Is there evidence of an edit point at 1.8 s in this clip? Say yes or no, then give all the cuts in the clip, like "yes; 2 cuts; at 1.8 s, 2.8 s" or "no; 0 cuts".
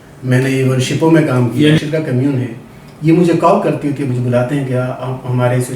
yes; 2 cuts; at 1.8 s, 4.1 s